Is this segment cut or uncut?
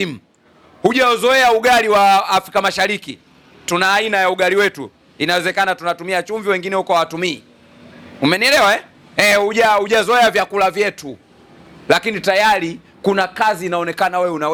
uncut